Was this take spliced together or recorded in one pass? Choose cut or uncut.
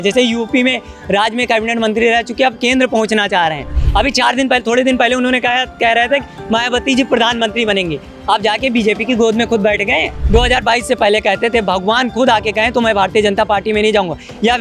cut